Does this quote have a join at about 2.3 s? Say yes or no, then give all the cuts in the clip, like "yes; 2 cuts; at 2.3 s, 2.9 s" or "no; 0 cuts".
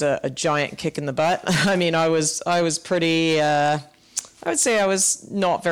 no; 0 cuts